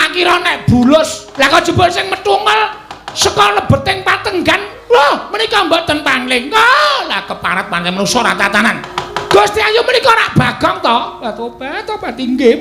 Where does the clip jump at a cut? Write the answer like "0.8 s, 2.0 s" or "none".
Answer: 1.2 s, 9.0 s

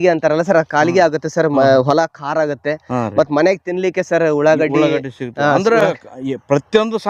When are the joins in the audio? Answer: none

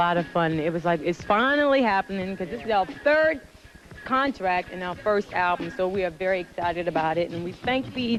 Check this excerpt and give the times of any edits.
none

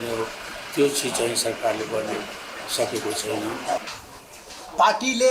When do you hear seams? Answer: 3.8 s

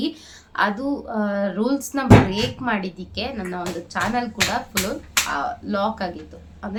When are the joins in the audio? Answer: none

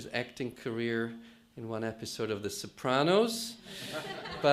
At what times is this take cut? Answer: 1.9 s

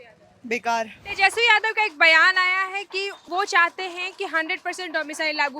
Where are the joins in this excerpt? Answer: 1.0 s, 3.2 s

